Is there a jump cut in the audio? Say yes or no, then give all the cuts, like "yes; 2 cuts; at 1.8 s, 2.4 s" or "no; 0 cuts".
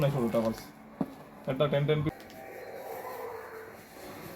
yes; 1 cut; at 2.1 s